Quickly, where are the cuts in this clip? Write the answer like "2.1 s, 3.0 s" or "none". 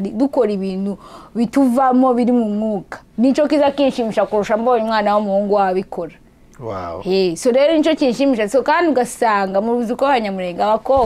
none